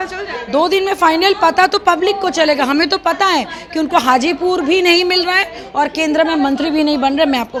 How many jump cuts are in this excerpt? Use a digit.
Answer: 0